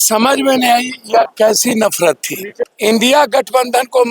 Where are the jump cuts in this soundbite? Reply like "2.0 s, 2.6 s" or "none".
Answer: 2.6 s